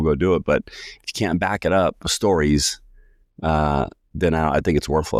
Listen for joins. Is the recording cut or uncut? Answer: uncut